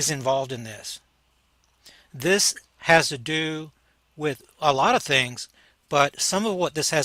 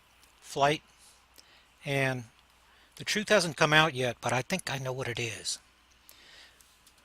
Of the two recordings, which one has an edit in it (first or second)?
second